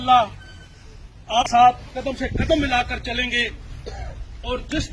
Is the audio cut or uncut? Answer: cut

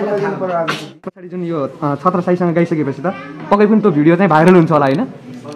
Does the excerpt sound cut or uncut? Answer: cut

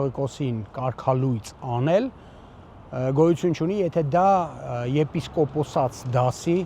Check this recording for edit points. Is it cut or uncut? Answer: uncut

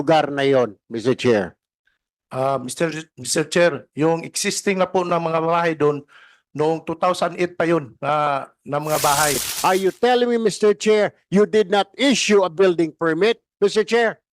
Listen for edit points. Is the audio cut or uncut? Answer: cut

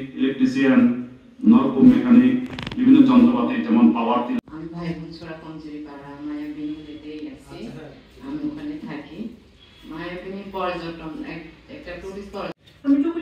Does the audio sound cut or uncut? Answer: cut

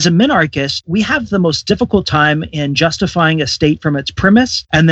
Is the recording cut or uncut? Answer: uncut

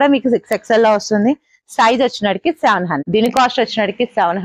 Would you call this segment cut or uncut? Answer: cut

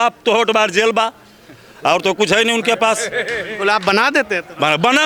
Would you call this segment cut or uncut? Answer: uncut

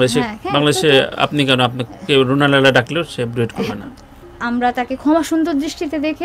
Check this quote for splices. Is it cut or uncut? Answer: cut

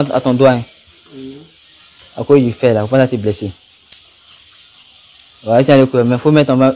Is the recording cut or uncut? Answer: uncut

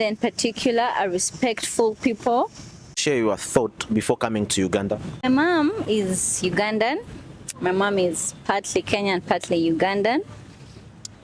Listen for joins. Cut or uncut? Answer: cut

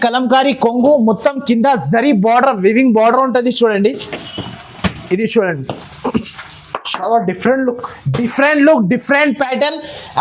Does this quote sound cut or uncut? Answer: uncut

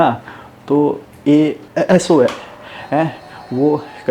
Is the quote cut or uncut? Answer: cut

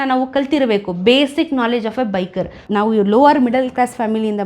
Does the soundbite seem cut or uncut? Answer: cut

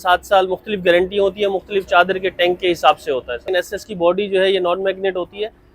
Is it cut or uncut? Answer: cut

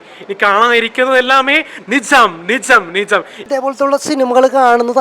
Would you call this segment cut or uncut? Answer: cut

